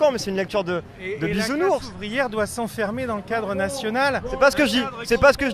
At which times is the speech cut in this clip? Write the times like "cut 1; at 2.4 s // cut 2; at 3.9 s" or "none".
none